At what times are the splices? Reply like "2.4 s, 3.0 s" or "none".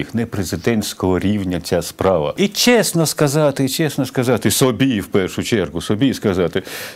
2.3 s